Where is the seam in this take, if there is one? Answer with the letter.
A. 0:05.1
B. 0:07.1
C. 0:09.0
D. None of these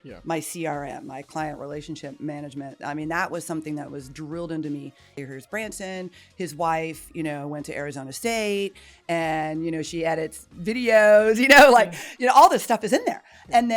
A